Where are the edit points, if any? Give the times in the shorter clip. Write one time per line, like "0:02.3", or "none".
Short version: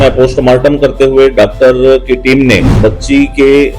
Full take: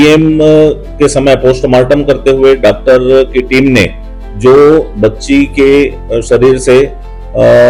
0:02.7